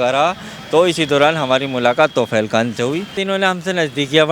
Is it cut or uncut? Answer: cut